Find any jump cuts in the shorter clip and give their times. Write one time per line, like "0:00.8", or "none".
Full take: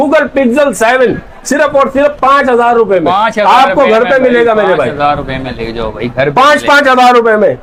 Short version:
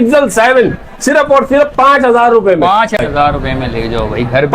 0:03.0